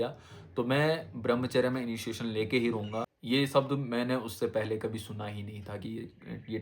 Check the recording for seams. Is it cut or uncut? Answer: cut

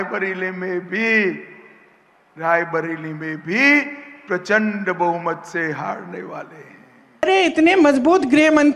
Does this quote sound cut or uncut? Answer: cut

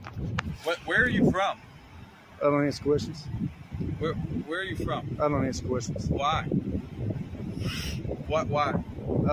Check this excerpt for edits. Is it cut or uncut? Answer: uncut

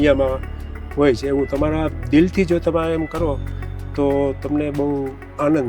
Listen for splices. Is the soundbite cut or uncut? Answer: uncut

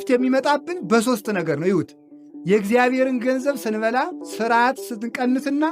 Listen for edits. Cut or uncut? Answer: cut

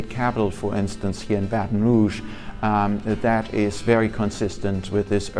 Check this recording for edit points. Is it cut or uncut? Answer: uncut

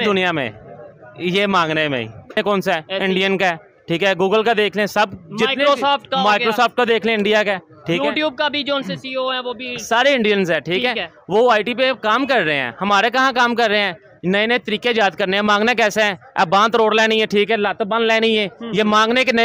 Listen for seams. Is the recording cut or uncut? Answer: cut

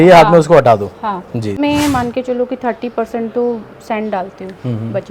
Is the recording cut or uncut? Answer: cut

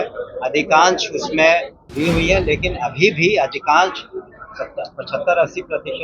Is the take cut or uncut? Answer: cut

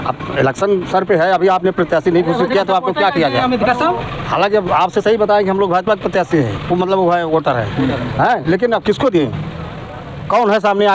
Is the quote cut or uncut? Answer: uncut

